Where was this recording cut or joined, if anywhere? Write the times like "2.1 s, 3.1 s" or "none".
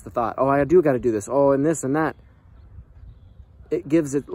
none